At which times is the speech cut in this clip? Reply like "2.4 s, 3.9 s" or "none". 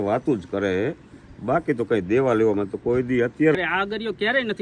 3.6 s